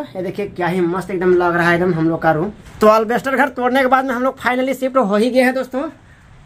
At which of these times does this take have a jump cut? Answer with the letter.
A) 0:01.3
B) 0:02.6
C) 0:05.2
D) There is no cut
B